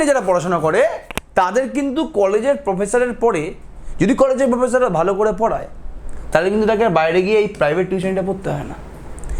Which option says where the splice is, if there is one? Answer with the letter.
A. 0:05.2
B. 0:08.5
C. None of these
C